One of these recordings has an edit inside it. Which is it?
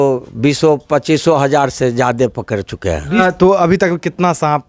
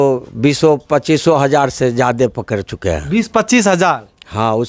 first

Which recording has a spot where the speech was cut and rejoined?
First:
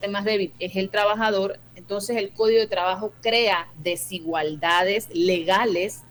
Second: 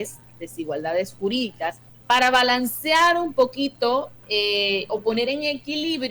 second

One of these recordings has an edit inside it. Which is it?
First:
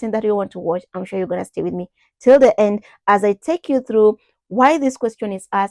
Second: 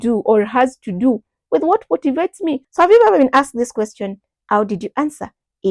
second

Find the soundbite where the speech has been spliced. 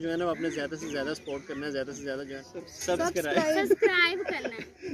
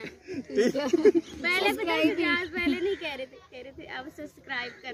first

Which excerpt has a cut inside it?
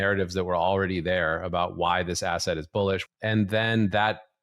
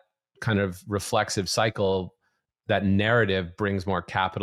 first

